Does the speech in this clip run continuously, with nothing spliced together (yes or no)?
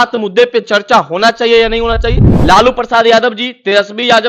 no